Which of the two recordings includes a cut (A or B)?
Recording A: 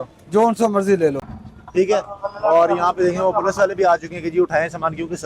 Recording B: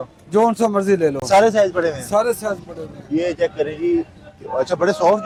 A